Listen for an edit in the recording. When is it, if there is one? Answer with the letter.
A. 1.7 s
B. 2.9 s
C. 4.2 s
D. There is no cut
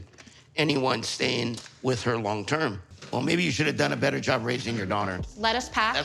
B